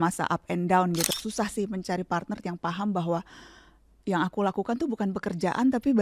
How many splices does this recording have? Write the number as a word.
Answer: one